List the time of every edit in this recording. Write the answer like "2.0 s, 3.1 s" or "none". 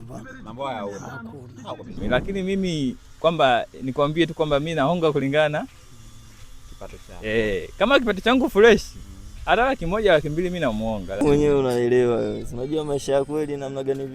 2.0 s, 11.2 s